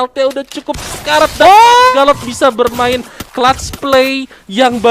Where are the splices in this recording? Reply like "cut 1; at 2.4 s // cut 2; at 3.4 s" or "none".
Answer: cut 1; at 1.9 s